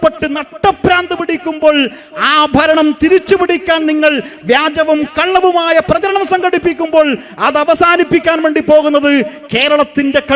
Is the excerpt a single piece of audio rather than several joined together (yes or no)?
yes